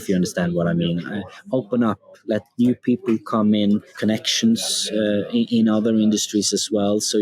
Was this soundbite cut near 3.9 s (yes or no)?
yes